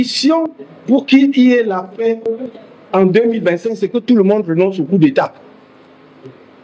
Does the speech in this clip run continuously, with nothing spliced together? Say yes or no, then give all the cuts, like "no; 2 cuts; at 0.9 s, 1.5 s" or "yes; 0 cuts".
yes; 0 cuts